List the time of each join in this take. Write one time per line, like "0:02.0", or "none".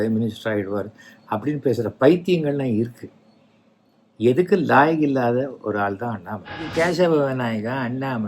0:06.6